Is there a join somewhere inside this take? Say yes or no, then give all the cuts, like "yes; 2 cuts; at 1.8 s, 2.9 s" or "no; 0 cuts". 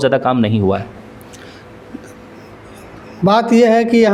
no; 0 cuts